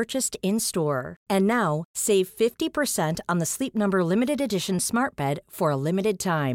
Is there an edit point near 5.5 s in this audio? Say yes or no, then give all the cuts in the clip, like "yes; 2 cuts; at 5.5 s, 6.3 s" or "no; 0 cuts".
no; 0 cuts